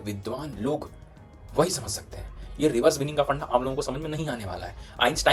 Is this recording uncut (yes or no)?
yes